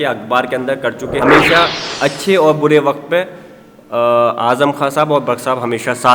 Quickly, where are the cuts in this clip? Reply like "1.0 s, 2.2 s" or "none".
1.1 s

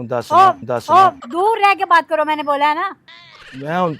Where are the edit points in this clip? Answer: 1.2 s

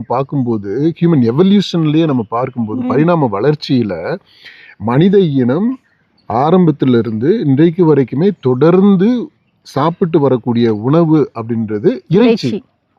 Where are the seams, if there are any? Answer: none

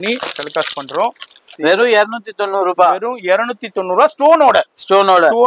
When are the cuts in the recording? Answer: 1.4 s

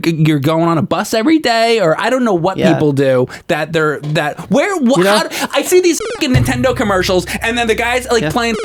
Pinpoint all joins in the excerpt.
none

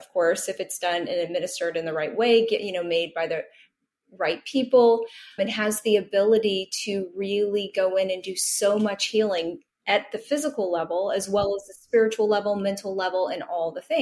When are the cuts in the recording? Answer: 5.4 s

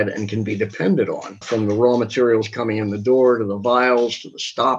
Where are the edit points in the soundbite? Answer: 1.3 s

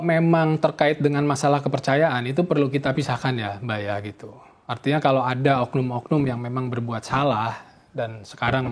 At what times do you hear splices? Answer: none

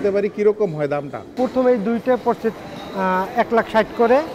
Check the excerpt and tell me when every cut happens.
1.3 s

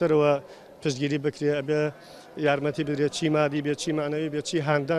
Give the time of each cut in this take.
none

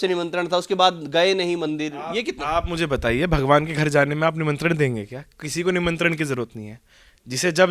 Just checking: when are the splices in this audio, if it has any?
none

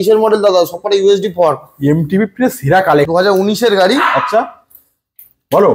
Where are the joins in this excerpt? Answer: 3.1 s

